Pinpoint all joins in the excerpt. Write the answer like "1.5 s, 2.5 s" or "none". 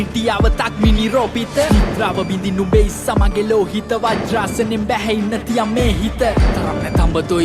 6.3 s